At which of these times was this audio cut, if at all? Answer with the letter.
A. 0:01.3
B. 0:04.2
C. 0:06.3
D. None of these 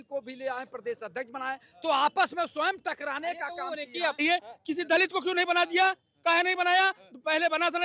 B